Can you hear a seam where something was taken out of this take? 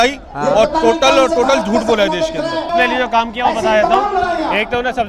no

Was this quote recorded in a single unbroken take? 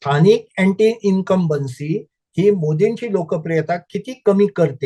yes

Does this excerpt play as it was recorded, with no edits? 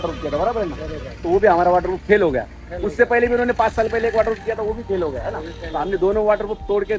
yes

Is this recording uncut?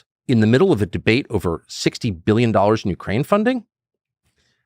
yes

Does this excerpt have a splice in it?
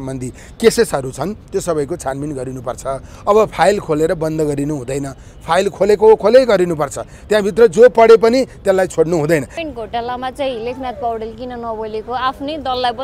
yes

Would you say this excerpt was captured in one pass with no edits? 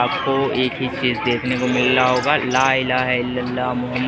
yes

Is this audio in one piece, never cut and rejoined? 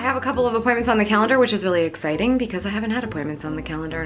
yes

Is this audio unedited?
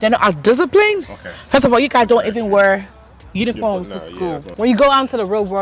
no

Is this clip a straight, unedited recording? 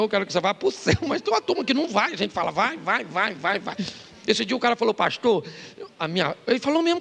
yes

